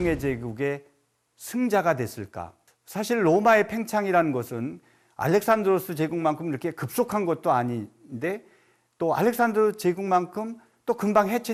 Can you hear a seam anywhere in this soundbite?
no; 0 cuts

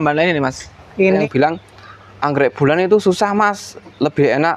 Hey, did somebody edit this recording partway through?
yes; 1 cut; at 1.2 s

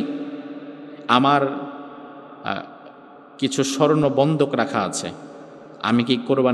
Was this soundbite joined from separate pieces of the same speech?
no; 0 cuts

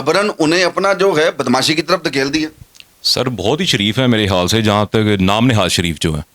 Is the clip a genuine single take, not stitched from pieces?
yes; 0 cuts

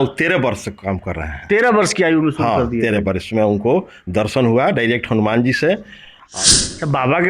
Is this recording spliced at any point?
yes; 1 cut; at 6.2 s

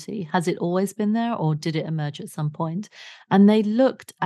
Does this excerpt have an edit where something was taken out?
no; 0 cuts

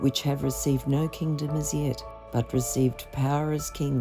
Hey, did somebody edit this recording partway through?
no; 0 cuts

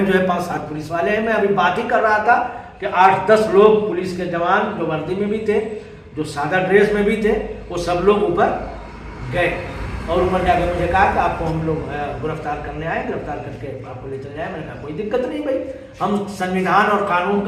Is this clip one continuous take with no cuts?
yes; 0 cuts

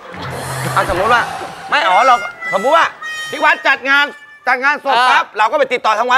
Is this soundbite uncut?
yes; 0 cuts

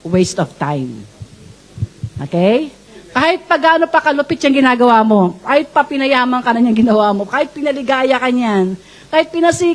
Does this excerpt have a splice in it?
no; 0 cuts

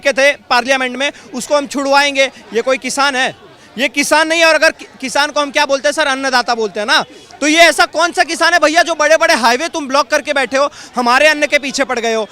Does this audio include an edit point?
no; 0 cuts

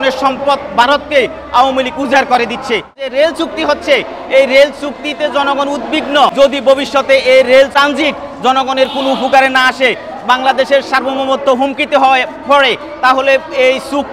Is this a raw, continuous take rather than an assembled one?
no; 3 cuts; at 2.9 s, 6.3 s, 7.7 s

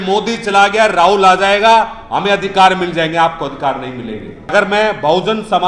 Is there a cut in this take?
yes; 1 cut; at 4.5 s

